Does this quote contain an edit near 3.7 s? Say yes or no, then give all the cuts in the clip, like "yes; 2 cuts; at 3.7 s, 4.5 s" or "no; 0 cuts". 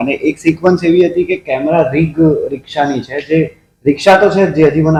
no; 0 cuts